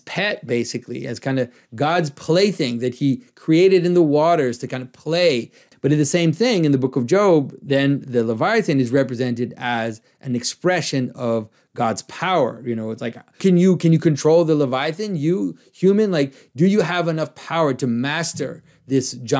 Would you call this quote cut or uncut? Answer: cut